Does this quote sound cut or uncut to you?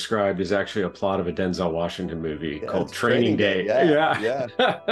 uncut